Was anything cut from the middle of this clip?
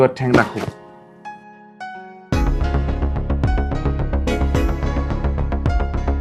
no; 0 cuts

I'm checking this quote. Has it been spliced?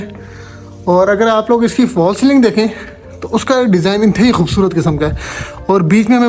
no; 0 cuts

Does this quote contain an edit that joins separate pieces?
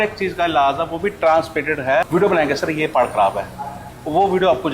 yes; 1 cut; at 2.1 s

